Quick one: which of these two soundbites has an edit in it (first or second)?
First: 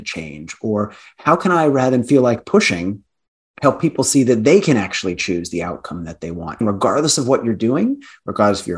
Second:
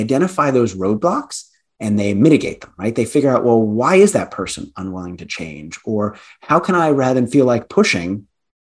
first